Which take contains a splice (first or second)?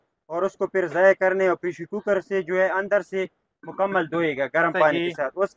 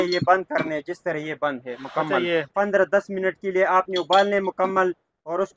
second